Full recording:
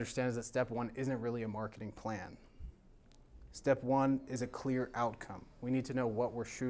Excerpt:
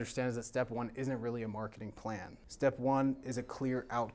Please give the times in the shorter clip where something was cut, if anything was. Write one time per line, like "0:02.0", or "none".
0:02.4